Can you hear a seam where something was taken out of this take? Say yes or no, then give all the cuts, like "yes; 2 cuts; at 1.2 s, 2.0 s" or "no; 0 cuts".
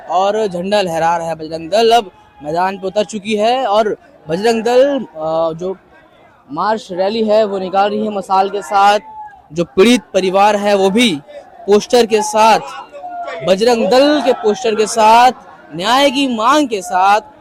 no; 0 cuts